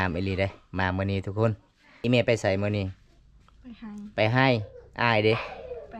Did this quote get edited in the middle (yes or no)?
yes